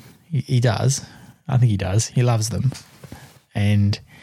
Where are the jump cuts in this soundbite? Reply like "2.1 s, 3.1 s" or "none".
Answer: 2.1 s